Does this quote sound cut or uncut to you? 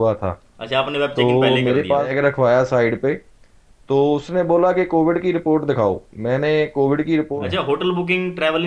cut